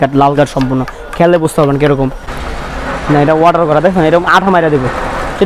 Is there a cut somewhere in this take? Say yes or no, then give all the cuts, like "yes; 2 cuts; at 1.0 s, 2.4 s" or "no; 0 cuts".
yes; 1 cut; at 2.3 s